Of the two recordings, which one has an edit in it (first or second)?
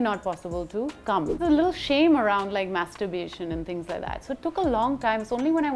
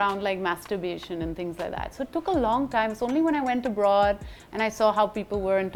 first